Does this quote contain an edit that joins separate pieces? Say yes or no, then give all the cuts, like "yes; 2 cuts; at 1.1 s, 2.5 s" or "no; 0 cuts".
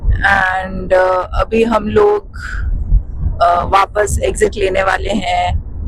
no; 0 cuts